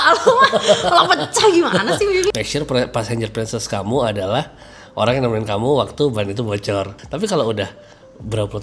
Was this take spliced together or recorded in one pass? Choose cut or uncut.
cut